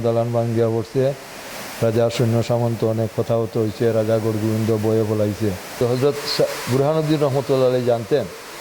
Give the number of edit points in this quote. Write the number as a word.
one